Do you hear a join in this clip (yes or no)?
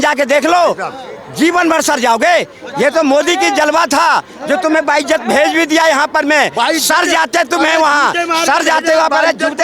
no